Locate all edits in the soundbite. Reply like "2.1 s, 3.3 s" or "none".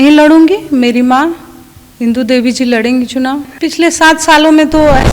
3.5 s